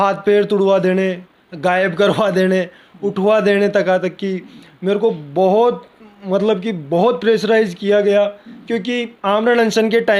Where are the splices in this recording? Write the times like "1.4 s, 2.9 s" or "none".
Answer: none